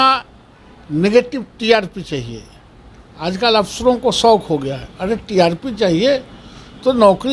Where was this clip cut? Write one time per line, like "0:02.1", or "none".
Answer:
none